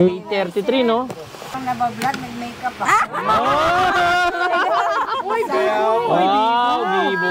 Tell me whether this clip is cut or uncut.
cut